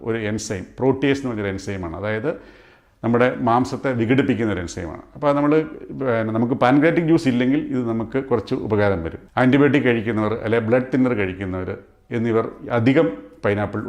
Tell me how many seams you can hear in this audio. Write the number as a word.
one